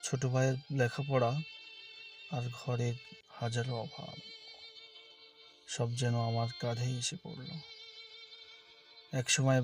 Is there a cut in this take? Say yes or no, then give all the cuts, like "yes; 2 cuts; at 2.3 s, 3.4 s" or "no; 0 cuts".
yes; 2 cuts; at 4.4 s, 5.7 s